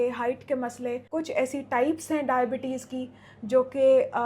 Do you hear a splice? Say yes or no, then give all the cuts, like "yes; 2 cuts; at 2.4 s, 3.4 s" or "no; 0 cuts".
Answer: yes; 1 cut; at 1.0 s